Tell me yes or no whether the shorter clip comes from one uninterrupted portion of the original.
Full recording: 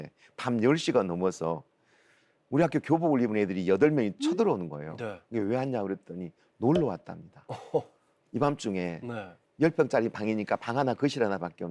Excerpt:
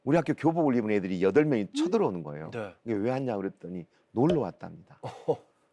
yes